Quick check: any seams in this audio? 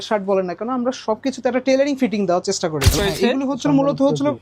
yes; 1 cut; at 2.9 s

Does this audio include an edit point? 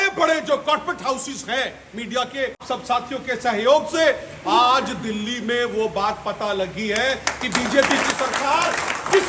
yes; 1 cut; at 2.6 s

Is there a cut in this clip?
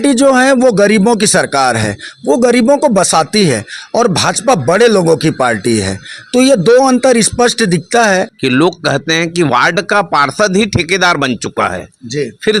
yes; 1 cut; at 8.3 s

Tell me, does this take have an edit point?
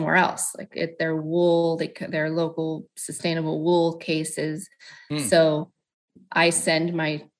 no; 0 cuts

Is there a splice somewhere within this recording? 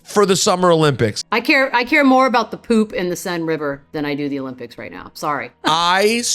yes; 2 cuts; at 1.3 s, 5.2 s

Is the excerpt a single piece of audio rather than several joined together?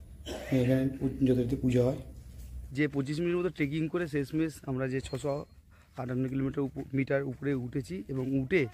yes; 0 cuts

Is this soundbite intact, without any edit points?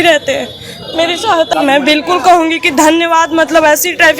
no; 1 cut; at 1.5 s

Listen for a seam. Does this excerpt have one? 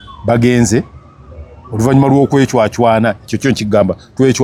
no; 0 cuts

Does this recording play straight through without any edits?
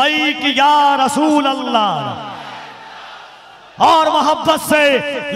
yes; 0 cuts

